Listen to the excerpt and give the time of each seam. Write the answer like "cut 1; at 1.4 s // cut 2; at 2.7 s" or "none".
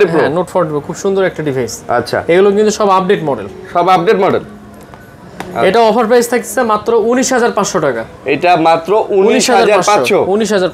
none